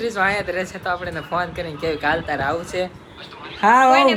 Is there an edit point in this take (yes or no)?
no